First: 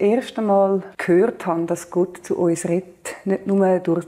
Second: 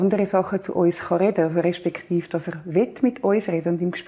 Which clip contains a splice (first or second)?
first